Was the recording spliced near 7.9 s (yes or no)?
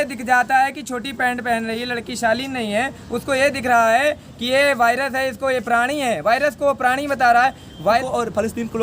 yes